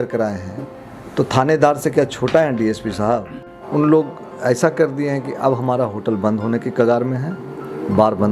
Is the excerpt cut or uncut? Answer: cut